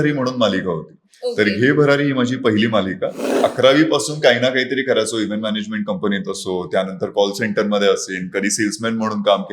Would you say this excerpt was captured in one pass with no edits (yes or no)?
no